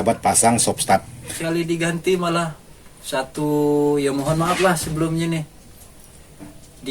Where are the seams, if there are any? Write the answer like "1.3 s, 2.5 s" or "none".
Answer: 1.3 s